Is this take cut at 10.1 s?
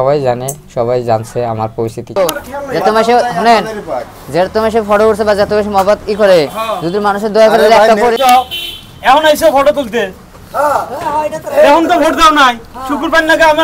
no; 2 cuts; at 2.2 s, 8.1 s

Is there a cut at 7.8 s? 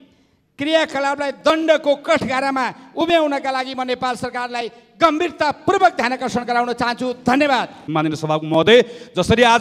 yes; 1 cut; at 7.8 s

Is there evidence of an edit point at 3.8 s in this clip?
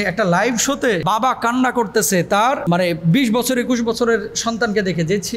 no; 2 cuts; at 1.0 s, 2.6 s

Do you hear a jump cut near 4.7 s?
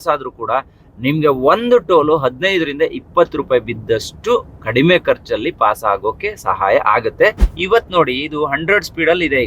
no; 1 cut; at 7.5 s

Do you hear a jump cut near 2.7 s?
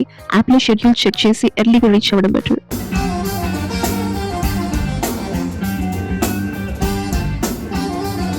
yes; 1 cut; at 2.7 s

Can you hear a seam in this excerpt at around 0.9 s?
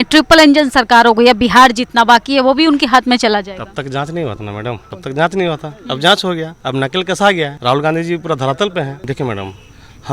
no; 4 cuts; at 4.9 s, 6.6 s, 7.6 s, 9.0 s

